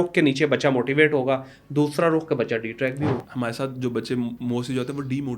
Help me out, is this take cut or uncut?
cut